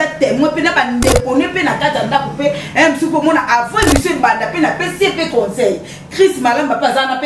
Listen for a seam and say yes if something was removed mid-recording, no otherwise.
no